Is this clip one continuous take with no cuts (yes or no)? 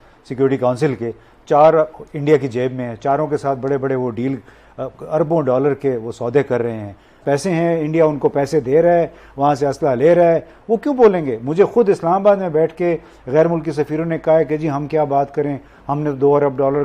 no